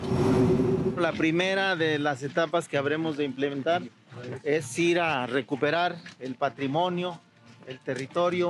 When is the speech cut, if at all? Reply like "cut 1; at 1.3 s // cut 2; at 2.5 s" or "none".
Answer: cut 1; at 1.0 s